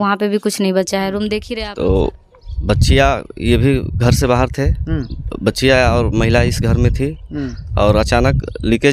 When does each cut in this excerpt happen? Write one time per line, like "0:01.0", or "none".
0:01.5